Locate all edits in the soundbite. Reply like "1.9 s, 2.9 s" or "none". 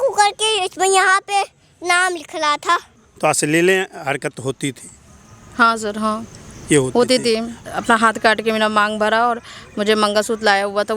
3.0 s, 7.6 s